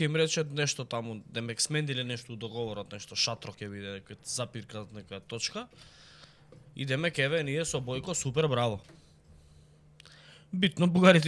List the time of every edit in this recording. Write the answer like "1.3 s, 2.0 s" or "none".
none